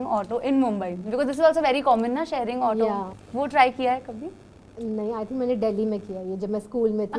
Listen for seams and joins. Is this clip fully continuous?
no; 1 cut; at 3.2 s

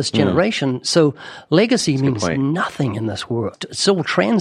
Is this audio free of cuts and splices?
no; 1 cut; at 3.5 s

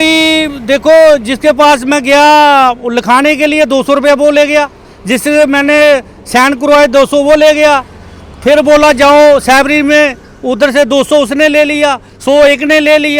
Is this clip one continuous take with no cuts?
yes; 0 cuts

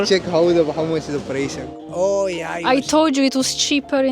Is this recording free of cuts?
no; 1 cut; at 1.6 s

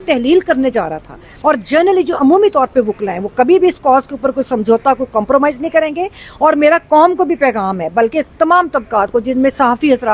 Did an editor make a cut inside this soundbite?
yes; 1 cut; at 1.3 s

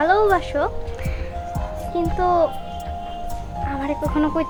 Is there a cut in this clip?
no; 0 cuts

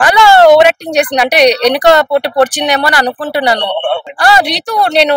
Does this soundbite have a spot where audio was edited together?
yes; 1 cut; at 4.1 s

